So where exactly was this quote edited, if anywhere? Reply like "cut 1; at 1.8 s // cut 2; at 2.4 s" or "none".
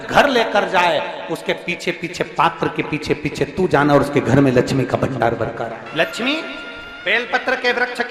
cut 1; at 5.8 s